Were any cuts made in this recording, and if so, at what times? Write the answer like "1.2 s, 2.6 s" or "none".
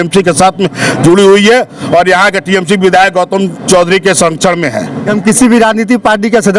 5.1 s